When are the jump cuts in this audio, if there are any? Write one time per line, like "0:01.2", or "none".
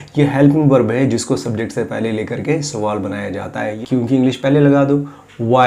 0:03.7